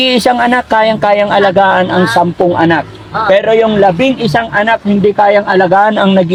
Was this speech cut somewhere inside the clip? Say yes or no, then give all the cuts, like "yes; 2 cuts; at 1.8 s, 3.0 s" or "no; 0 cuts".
no; 0 cuts